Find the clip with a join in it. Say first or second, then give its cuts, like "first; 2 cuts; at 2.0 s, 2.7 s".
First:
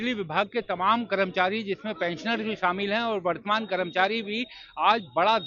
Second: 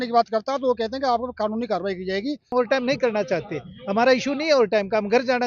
second; 1 cut; at 2.5 s